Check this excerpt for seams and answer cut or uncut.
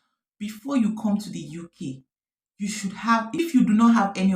cut